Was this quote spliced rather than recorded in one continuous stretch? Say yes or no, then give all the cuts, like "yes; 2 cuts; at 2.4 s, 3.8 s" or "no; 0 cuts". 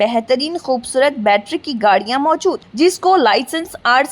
no; 0 cuts